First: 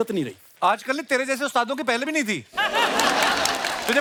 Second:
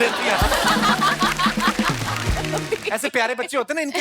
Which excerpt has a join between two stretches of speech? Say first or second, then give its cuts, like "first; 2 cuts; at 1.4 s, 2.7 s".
second; 1 cut; at 2.6 s